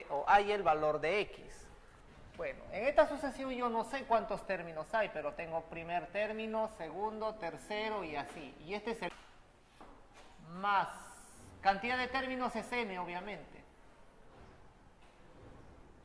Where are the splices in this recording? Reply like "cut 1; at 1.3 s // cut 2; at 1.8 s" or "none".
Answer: none

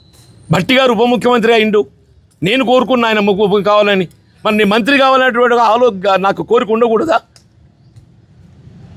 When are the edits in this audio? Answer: none

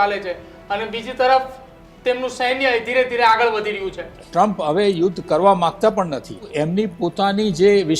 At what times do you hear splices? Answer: cut 1; at 4.2 s // cut 2; at 6.4 s

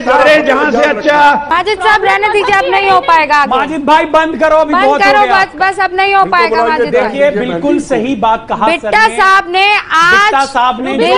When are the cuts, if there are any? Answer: cut 1; at 1.5 s

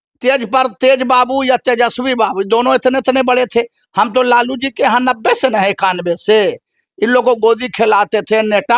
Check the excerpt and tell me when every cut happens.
none

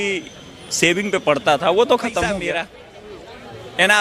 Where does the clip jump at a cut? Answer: cut 1; at 2.4 s

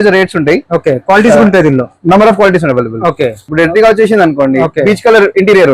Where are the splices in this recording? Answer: cut 1; at 3.4 s

